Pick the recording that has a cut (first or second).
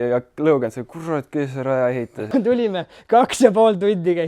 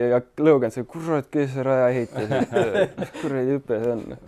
first